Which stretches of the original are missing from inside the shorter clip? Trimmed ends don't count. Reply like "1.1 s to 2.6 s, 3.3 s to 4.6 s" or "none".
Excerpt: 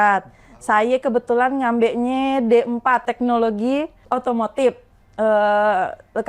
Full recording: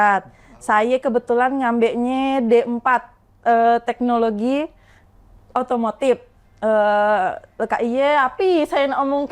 3.1 s to 3.9 s, 4.8 s to 5.4 s